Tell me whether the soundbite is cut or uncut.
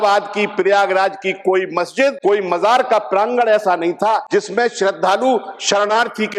cut